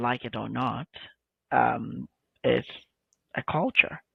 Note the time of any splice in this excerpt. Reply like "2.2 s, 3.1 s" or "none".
none